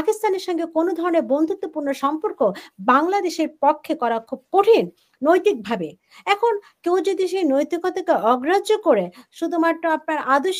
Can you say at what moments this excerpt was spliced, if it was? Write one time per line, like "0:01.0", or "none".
none